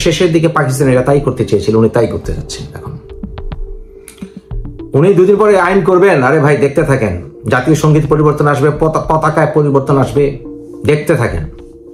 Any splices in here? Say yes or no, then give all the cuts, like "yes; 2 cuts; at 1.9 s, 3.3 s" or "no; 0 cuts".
no; 0 cuts